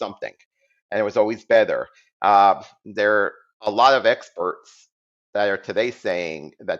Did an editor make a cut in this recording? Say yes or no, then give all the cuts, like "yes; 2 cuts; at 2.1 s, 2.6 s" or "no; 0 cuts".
no; 0 cuts